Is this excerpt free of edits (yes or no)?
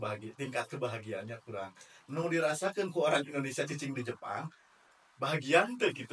yes